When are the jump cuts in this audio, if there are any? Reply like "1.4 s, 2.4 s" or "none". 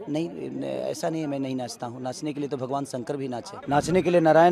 3.5 s